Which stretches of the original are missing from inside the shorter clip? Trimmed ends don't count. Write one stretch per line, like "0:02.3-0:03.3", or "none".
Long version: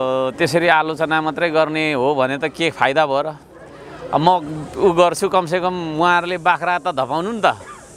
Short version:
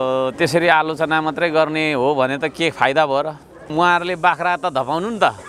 0:03.6-0:05.9